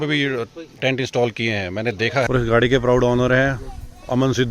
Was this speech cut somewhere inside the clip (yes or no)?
yes